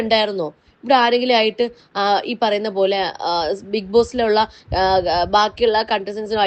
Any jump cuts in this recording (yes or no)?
no